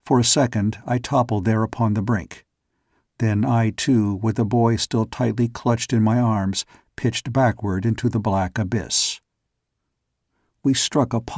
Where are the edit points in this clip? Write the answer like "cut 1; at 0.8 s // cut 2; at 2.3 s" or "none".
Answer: cut 1; at 6.9 s